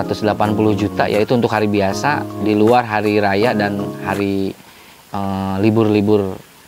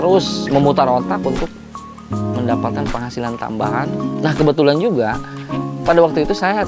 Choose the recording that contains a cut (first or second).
second